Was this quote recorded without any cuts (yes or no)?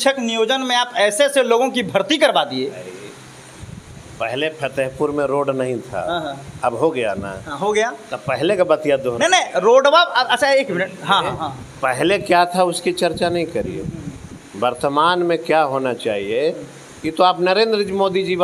yes